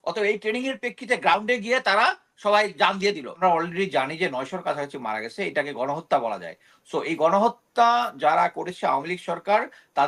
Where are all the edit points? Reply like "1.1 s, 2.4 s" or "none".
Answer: 3.4 s